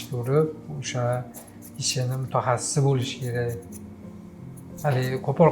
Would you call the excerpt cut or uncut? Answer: uncut